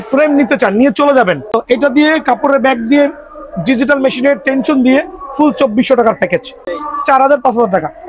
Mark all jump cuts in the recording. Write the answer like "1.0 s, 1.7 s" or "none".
1.5 s, 6.7 s